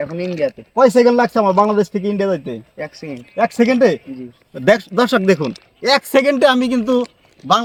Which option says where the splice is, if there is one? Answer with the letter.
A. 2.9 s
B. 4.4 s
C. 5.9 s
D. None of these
D